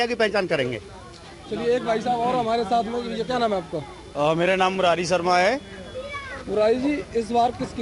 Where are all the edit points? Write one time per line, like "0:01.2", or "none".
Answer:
none